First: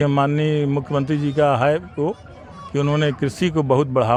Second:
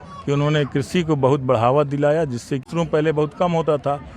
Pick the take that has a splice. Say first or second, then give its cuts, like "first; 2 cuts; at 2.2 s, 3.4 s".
second; 1 cut; at 2.7 s